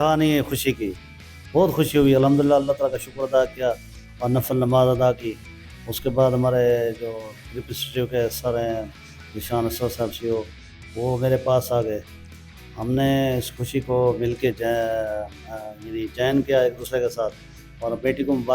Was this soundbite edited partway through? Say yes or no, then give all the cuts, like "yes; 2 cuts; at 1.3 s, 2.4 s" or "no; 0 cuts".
no; 0 cuts